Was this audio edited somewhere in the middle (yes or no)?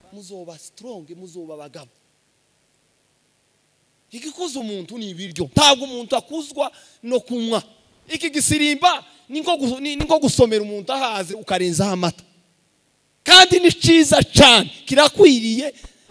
no